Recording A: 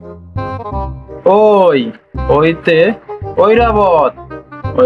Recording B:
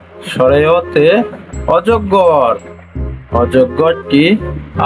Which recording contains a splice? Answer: A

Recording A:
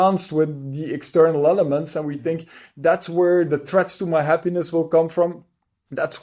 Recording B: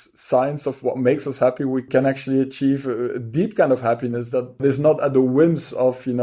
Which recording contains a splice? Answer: B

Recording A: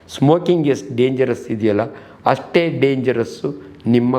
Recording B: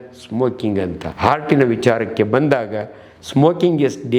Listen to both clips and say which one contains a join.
B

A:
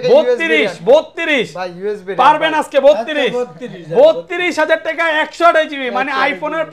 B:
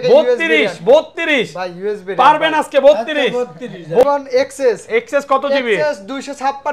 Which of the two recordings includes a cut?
B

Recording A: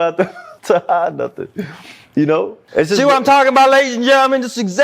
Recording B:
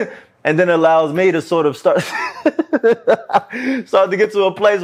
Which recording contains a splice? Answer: A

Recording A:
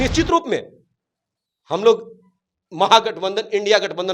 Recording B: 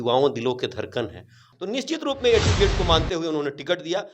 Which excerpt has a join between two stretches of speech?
B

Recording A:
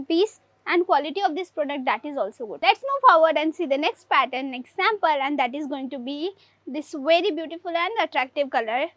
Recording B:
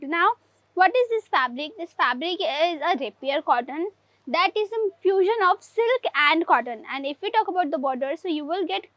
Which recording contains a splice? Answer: A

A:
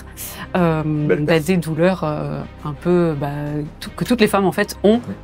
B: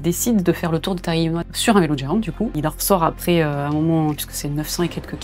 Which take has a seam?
B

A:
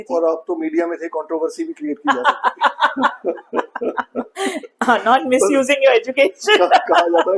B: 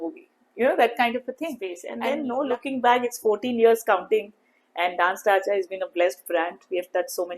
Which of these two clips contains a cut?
B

